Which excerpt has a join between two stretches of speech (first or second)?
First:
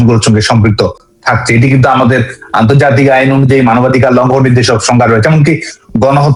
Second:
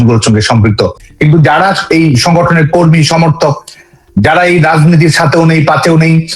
second